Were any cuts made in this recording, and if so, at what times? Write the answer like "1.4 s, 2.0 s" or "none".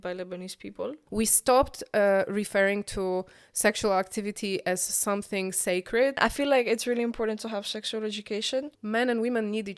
1.0 s, 6.2 s, 8.7 s